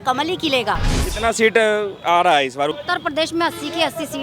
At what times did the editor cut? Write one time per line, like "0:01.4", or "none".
0:01.0
0:02.7